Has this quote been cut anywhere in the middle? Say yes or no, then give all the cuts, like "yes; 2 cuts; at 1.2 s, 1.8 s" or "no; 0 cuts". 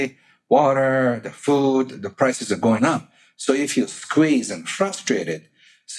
no; 0 cuts